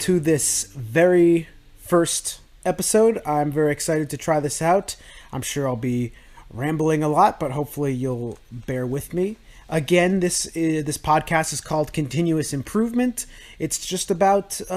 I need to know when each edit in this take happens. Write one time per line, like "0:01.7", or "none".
0:03.3